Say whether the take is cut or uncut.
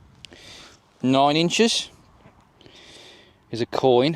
cut